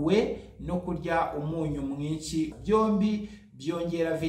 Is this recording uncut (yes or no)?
no